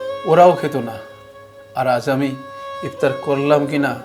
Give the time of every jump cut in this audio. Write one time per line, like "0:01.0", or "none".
none